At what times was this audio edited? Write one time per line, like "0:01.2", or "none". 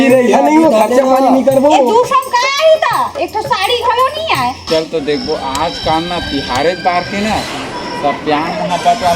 0:04.7